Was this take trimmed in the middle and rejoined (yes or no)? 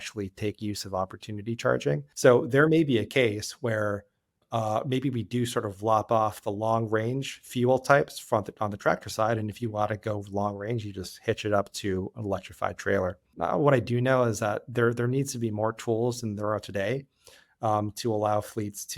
yes